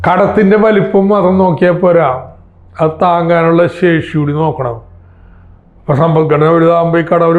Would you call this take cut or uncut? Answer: uncut